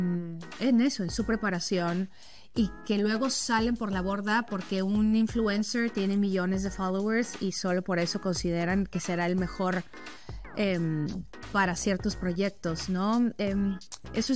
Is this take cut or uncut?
uncut